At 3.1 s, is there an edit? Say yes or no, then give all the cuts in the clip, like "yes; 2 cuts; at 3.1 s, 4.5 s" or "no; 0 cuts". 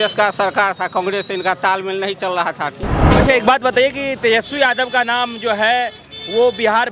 yes; 1 cut; at 3.1 s